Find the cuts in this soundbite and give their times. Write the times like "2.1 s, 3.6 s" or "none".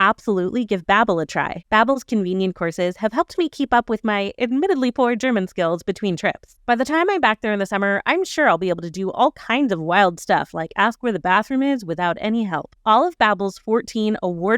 1.5 s, 12.7 s